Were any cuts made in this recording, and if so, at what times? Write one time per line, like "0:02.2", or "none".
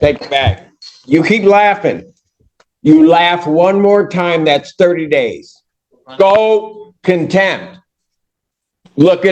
none